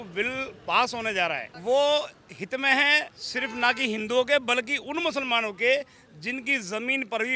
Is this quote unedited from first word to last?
no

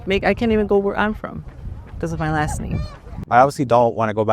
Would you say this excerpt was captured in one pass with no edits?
no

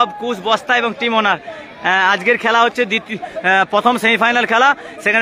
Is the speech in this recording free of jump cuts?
yes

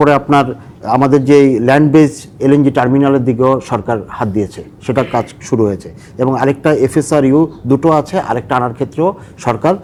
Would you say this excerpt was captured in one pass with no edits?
yes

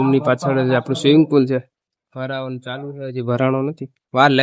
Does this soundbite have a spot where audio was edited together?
no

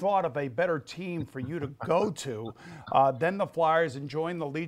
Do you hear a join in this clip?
no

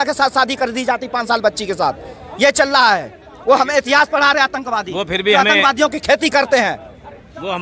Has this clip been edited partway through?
no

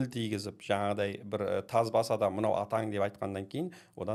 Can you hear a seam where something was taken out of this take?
no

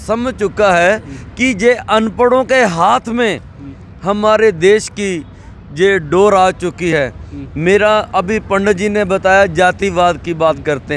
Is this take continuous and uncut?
yes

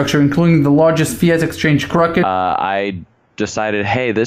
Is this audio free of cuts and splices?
yes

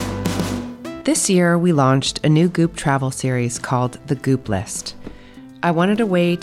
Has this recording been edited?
yes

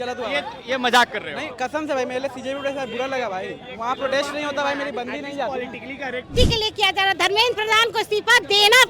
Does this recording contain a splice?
yes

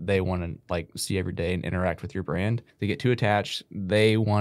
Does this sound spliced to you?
yes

